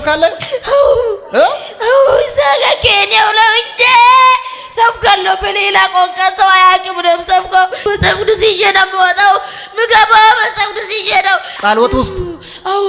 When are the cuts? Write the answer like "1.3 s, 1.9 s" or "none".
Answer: 7.8 s, 11.6 s